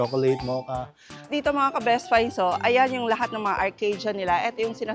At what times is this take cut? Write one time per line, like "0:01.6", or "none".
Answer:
0:01.3